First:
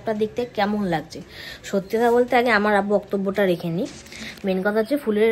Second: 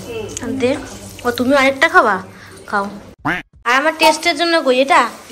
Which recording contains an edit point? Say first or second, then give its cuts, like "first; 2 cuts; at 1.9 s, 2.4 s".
second; 1 cut; at 3.4 s